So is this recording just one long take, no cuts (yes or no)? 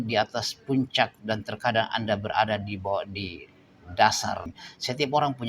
no